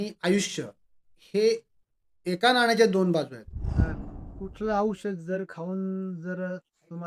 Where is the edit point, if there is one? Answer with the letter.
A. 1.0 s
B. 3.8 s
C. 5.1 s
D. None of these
B